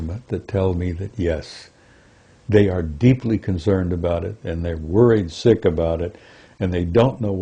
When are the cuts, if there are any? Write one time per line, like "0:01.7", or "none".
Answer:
none